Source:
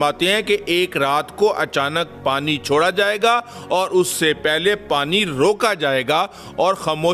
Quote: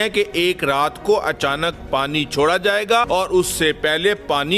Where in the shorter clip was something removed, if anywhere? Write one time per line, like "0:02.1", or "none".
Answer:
0:03.1